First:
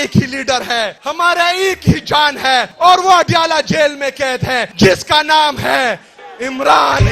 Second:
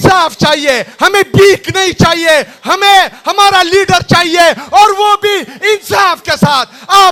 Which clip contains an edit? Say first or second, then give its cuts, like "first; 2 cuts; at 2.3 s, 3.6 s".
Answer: first; 3 cuts; at 1.0 s, 2.7 s, 4.7 s